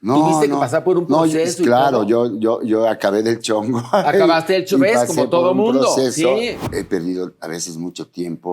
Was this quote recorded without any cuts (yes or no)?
no